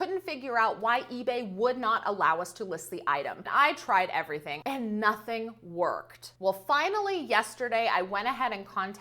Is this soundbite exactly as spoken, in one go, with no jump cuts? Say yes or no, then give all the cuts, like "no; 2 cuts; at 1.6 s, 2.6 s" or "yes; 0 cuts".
no; 2 cuts; at 3.5 s, 4.5 s